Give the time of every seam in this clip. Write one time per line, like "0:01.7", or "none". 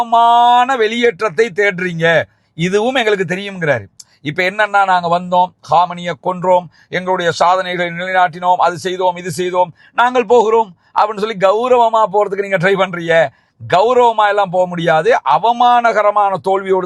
none